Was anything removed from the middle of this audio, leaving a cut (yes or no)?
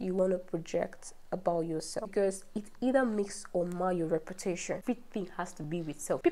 yes